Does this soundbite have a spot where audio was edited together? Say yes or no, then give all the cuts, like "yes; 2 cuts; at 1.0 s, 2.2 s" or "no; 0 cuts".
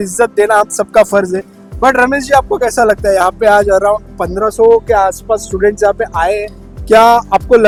no; 0 cuts